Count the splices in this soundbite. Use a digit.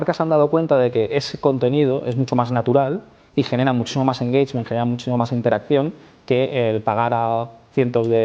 0